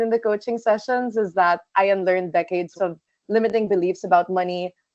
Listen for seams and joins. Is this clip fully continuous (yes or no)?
no